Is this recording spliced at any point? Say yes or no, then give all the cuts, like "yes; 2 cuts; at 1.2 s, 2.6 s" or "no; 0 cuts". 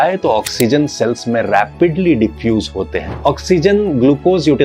yes; 1 cut; at 3.0 s